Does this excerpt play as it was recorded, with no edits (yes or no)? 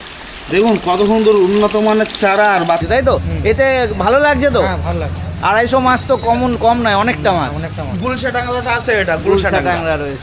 no